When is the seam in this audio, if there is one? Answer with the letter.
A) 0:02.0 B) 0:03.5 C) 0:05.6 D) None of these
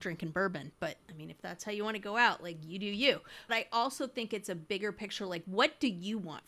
B